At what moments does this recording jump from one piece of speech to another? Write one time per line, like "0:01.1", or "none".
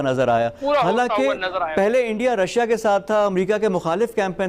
none